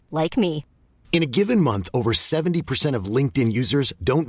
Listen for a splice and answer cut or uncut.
uncut